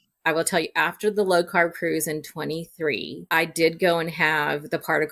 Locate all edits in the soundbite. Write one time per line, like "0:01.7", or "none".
0:03.2